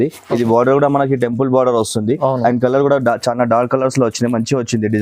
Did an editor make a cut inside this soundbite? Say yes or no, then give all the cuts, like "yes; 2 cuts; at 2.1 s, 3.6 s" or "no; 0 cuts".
no; 0 cuts